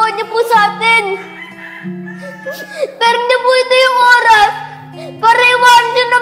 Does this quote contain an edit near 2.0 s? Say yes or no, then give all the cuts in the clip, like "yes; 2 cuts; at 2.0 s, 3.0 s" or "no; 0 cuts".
no; 0 cuts